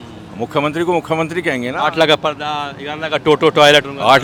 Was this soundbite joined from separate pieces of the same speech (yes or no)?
no